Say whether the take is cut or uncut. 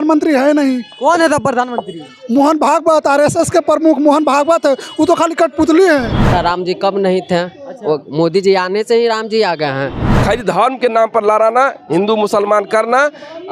cut